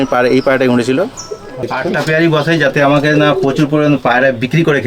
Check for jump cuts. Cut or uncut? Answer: cut